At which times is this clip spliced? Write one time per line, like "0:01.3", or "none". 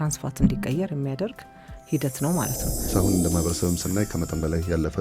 0:02.9